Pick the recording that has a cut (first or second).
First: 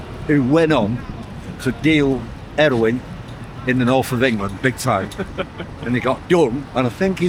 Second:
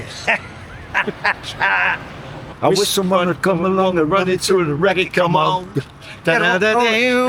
second